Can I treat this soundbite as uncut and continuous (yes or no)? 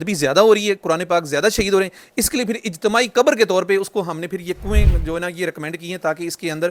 yes